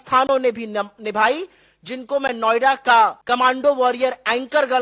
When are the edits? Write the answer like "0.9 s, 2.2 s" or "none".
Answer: 3.2 s